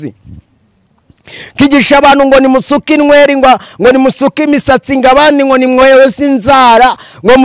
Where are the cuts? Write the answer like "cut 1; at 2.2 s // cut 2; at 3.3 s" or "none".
none